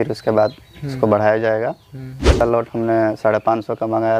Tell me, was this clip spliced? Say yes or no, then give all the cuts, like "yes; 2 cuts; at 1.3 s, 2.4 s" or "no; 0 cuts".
yes; 1 cut; at 2.4 s